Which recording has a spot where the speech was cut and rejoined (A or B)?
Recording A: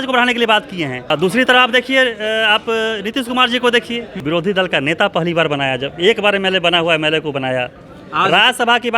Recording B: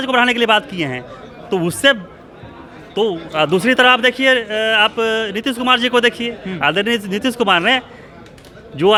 A